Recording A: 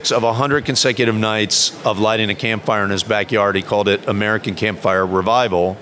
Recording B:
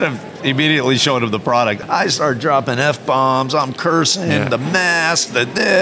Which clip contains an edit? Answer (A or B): B